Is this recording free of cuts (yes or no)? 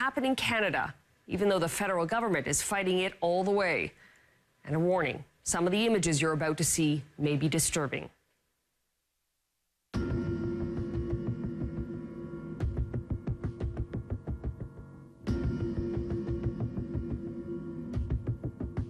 no